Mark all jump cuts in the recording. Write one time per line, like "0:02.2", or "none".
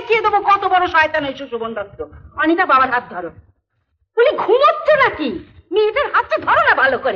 none